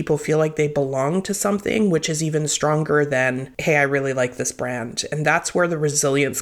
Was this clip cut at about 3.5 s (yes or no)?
yes